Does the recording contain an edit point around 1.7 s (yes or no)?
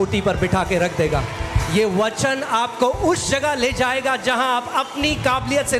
no